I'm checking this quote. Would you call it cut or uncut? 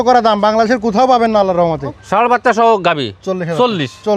cut